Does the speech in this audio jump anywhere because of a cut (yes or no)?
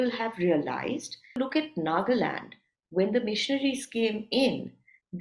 yes